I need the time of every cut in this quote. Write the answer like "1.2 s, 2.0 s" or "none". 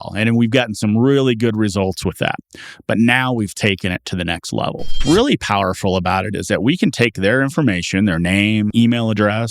5.0 s